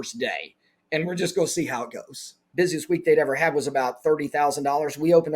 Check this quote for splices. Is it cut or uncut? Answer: cut